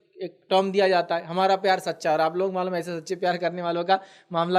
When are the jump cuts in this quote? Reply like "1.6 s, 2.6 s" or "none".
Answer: none